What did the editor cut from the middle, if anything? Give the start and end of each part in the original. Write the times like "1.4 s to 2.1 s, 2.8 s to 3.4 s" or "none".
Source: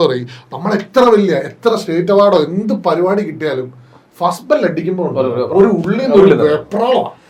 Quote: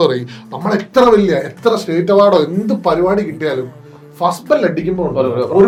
none